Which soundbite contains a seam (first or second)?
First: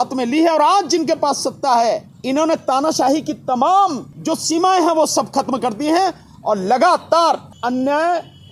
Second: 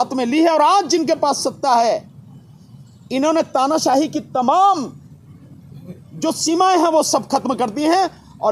first